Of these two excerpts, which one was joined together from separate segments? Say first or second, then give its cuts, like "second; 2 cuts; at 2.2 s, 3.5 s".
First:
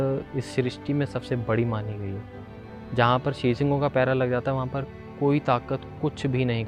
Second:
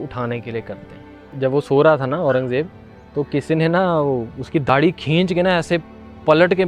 second; 2 cuts; at 1.3 s, 4.7 s